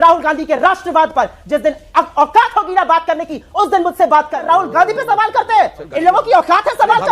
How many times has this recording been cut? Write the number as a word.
one